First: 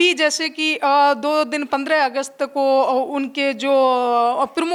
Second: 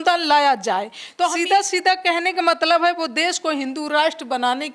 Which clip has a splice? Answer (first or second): second